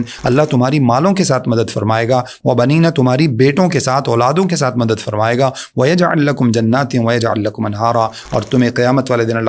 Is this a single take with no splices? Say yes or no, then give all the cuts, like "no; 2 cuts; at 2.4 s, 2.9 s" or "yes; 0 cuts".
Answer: yes; 0 cuts